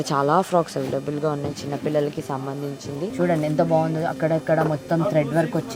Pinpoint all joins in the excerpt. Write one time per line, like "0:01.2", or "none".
0:03.1